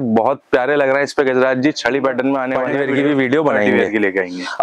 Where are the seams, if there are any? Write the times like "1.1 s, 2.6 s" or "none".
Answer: 2.6 s